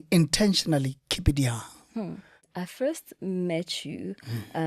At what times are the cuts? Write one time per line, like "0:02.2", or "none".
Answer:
0:02.6